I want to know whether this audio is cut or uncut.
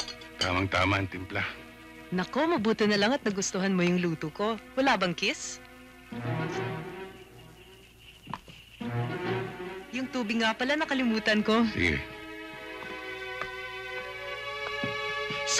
cut